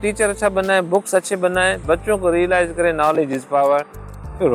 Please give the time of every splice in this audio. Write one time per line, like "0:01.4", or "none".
none